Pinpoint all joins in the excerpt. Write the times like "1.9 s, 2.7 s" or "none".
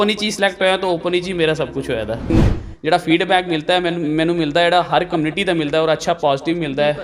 2.3 s